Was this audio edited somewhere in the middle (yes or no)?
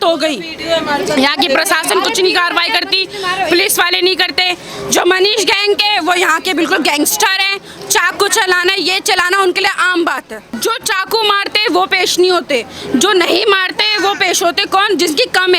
yes